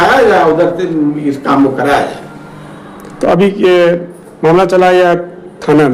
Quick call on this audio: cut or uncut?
uncut